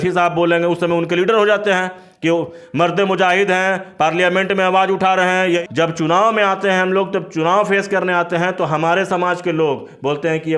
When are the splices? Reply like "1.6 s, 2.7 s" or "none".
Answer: 5.6 s